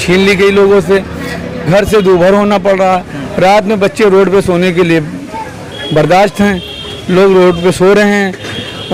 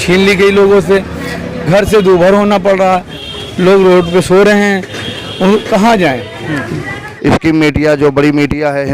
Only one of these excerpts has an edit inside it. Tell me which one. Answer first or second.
second